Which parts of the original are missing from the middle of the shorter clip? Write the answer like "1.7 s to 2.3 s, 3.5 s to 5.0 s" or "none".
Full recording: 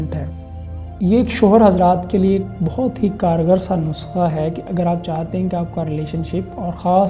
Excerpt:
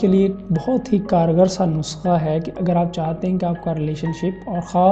none